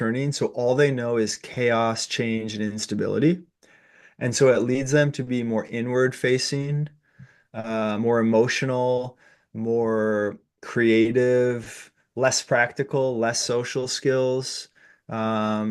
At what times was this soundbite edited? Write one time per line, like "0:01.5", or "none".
none